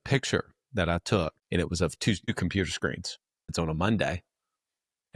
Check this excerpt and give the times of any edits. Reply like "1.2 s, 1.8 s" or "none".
1.4 s, 3.5 s